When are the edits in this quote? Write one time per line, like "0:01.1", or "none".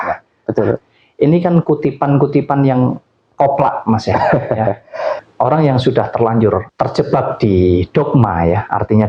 0:05.2